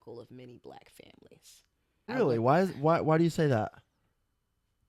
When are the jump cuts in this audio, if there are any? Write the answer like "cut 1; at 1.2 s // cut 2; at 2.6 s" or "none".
cut 1; at 2.0 s